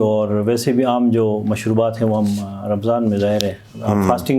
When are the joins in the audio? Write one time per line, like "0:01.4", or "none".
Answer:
none